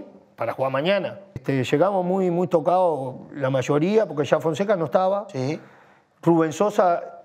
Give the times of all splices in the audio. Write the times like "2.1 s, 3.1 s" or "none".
1.3 s